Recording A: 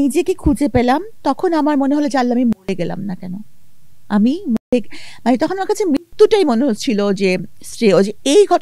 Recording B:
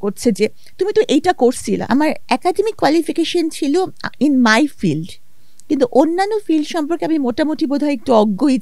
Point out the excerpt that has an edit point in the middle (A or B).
B